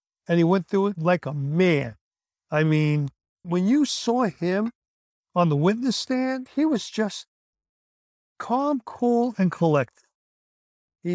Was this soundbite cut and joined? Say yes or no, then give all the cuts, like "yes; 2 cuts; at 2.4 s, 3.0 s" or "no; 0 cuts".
no; 0 cuts